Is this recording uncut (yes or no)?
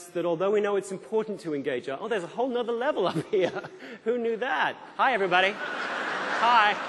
yes